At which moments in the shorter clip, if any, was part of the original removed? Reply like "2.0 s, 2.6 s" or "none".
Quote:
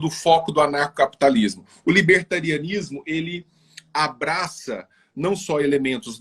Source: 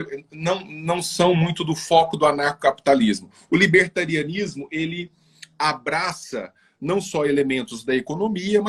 none